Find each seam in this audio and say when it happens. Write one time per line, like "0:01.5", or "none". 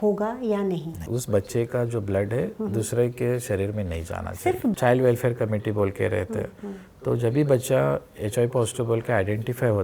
0:01.1
0:04.8